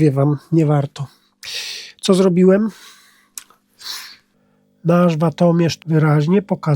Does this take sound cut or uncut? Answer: cut